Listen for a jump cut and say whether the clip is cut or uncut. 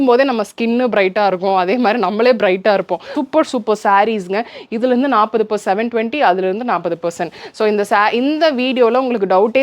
cut